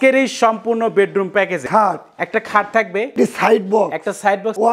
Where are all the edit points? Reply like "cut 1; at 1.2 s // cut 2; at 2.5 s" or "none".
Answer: cut 1; at 1.6 s // cut 2; at 3.1 s